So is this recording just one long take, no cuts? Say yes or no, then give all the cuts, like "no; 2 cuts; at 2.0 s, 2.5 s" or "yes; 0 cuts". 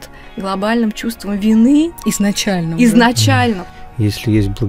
no; 1 cut; at 3.7 s